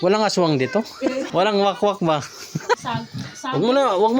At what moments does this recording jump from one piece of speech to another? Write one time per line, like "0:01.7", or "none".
0:01.2
0:02.8